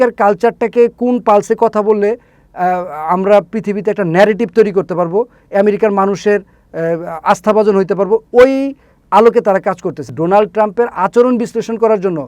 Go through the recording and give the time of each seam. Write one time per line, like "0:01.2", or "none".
0:10.1